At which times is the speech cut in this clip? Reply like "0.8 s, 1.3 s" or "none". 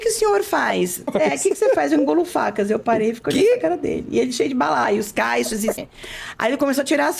1.0 s, 5.8 s